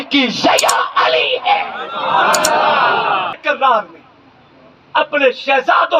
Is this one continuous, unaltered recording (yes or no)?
no